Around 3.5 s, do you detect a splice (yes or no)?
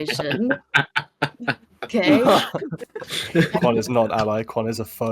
yes